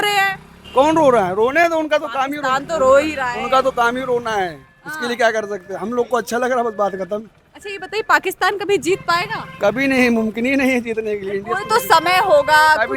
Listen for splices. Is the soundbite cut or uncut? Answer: uncut